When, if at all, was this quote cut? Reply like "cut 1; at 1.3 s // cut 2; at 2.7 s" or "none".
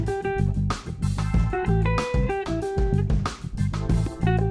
none

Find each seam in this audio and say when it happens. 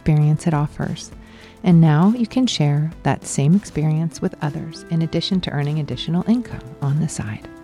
none

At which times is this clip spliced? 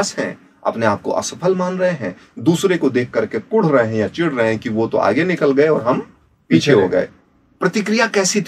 cut 1; at 7.2 s

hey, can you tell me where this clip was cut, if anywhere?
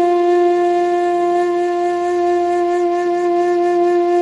none

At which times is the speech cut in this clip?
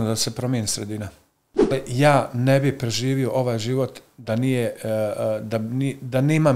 cut 1; at 1.7 s

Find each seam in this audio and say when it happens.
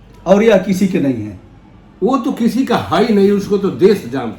none

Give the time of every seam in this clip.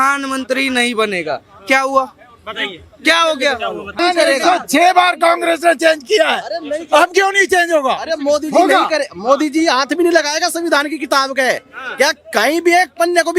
cut 1; at 4.0 s

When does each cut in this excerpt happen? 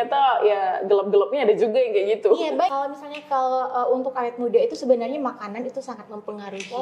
cut 1; at 2.7 s

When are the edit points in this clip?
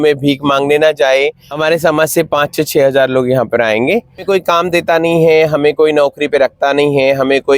cut 1; at 1.4 s // cut 2; at 4.2 s

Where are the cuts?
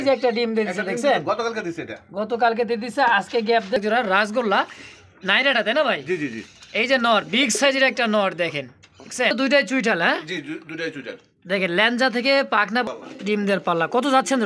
cut 1; at 3.8 s // cut 2; at 9.3 s // cut 3; at 12.8 s

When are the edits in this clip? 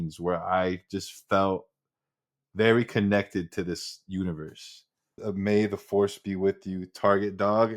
cut 1; at 5.2 s

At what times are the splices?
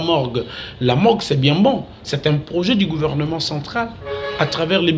none

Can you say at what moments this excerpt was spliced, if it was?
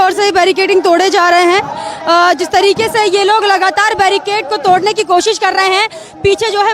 none

